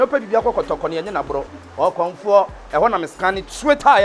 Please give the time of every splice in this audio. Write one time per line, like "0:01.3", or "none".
none